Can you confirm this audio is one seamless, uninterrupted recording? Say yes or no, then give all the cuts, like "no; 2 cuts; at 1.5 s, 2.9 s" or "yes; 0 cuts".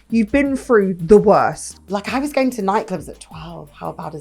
no; 1 cut; at 1.7 s